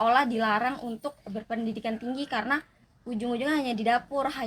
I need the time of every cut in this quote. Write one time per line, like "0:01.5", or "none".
none

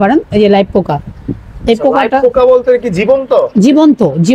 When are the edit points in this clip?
none

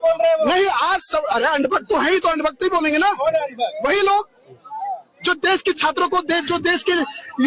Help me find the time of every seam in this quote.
none

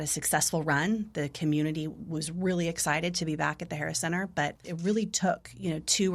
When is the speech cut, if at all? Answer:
0:04.7

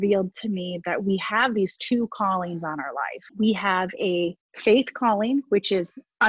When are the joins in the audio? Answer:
0:03.2
0:04.5

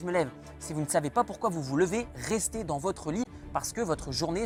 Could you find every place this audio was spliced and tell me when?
none

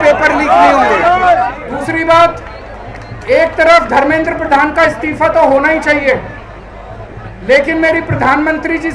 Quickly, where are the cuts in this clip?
0:01.7

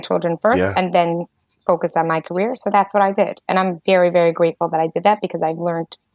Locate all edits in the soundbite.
none

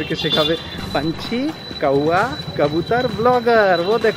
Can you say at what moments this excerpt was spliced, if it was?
none

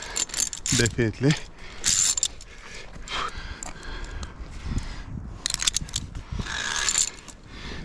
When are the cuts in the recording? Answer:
0:03.3

